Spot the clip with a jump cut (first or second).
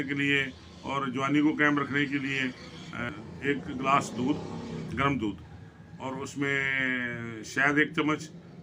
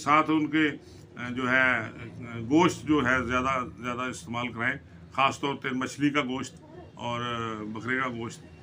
first